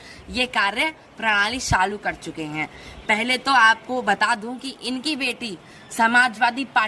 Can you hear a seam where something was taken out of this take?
no; 0 cuts

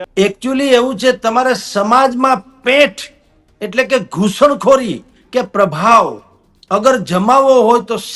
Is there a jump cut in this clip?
no; 0 cuts

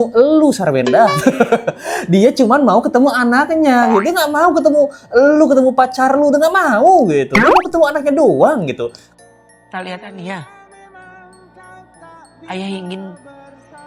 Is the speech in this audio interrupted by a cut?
no; 0 cuts

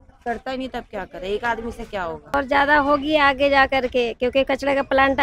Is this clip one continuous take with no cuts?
no; 1 cut; at 2.3 s

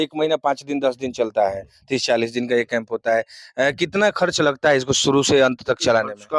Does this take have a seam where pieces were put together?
no; 0 cuts

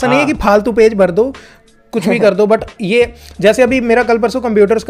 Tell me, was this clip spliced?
no; 0 cuts

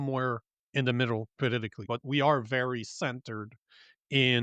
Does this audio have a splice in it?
yes; 1 cut; at 1.9 s

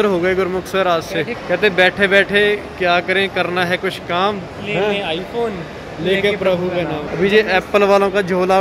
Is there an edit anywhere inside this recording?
yes; 3 cuts; at 1.4 s, 4.5 s, 7.0 s

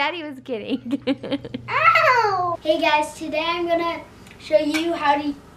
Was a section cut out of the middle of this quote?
yes; 1 cut; at 2.6 s

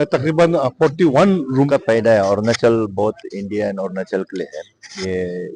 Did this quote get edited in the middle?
yes; 1 cut; at 1.5 s

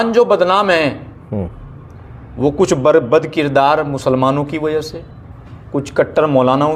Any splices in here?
no; 0 cuts

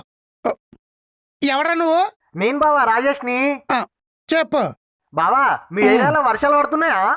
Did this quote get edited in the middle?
no; 0 cuts

